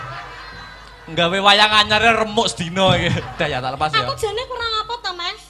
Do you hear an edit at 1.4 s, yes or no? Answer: no